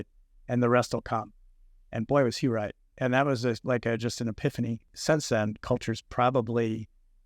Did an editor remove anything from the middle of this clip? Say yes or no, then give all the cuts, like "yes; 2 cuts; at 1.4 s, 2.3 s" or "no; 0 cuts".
yes; 1 cut; at 4.9 s